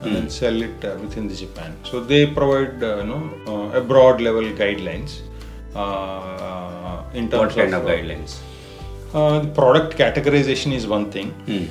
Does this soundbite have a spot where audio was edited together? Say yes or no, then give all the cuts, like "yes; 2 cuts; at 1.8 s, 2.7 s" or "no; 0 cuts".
no; 0 cuts